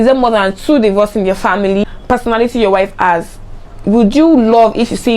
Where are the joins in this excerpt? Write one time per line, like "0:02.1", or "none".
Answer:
0:01.9